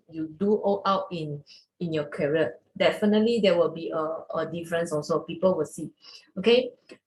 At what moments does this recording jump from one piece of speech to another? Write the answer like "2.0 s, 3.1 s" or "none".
none